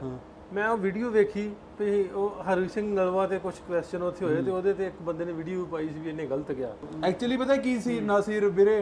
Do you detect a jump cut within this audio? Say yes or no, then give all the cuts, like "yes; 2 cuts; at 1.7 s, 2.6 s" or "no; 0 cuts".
no; 0 cuts